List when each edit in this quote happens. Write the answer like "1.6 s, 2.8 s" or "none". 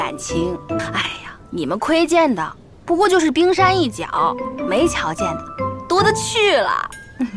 0.9 s